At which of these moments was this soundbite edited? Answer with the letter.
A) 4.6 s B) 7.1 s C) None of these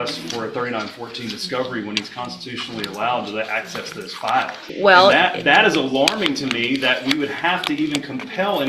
A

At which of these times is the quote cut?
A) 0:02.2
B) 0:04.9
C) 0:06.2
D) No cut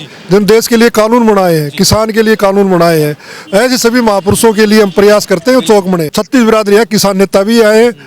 C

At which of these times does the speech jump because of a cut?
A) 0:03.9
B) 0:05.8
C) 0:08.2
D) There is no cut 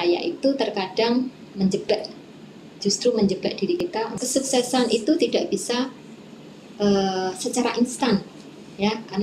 A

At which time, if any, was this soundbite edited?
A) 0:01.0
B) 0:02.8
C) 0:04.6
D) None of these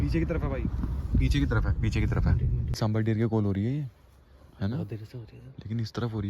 B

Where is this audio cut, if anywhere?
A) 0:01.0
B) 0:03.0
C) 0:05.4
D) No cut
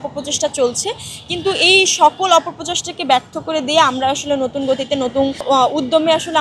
D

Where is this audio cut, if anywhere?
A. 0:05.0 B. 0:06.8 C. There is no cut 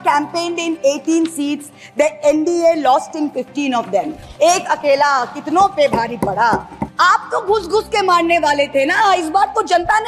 B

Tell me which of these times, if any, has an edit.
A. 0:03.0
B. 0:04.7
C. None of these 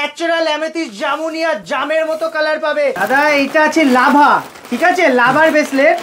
A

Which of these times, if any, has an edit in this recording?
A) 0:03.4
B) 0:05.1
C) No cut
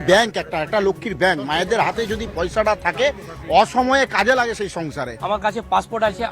B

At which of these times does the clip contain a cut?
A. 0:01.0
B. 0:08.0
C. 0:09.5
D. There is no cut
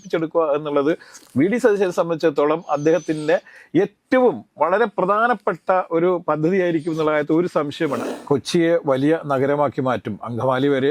B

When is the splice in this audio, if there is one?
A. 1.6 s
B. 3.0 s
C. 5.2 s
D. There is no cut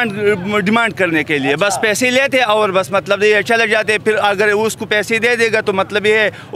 D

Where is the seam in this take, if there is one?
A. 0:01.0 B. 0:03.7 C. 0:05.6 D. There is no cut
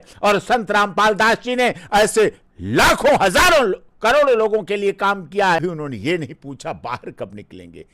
C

